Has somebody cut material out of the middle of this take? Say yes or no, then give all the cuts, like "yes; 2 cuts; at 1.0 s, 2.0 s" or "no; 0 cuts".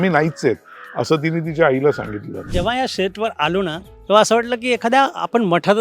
yes; 1 cut; at 2.5 s